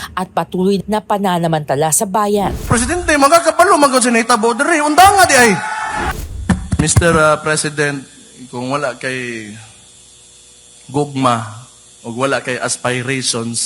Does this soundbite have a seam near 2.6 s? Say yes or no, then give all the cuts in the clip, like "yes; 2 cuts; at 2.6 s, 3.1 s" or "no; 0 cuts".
yes; 2 cuts; at 2.6 s, 6.0 s